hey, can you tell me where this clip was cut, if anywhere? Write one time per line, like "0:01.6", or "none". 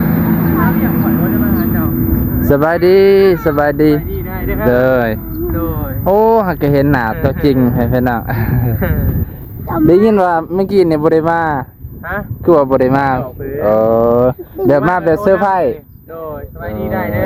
none